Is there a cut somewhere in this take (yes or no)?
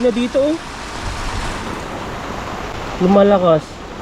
yes